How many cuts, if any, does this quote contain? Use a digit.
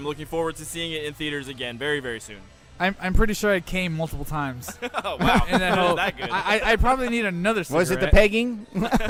0